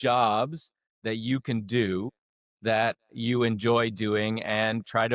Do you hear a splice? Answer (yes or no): no